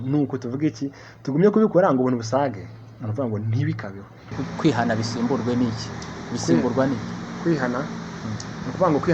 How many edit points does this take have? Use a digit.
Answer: 1